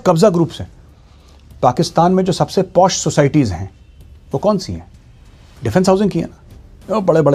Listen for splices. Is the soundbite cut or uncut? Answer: uncut